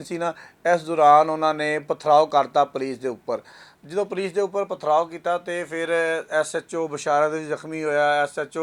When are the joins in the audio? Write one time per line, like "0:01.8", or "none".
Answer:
none